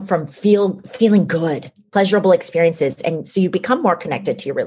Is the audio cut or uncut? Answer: cut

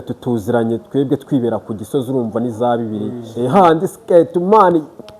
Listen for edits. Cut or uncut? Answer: cut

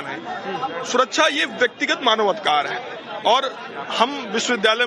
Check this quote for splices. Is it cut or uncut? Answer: uncut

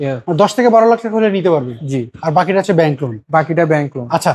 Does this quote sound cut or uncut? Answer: uncut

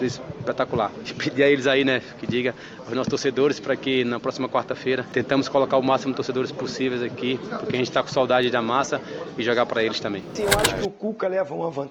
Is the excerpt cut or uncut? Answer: cut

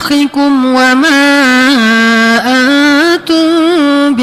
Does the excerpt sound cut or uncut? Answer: uncut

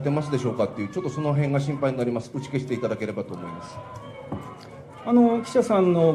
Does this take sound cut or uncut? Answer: uncut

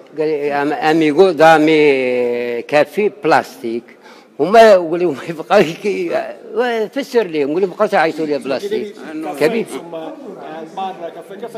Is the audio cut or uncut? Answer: uncut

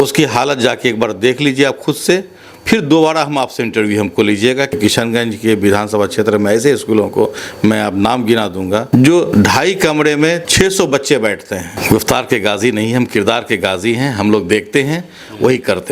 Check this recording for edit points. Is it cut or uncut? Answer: cut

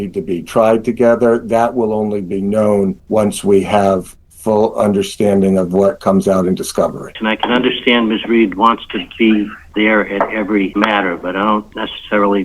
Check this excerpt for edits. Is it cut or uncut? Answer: cut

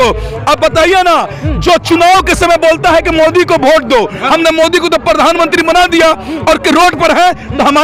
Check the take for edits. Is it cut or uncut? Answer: uncut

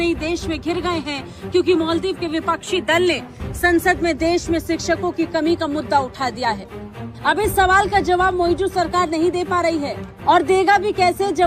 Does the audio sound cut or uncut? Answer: uncut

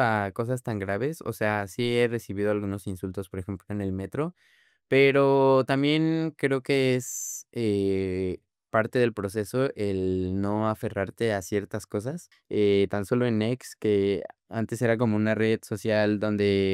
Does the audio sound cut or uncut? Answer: cut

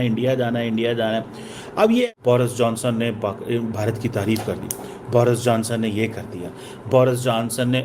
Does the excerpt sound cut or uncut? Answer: cut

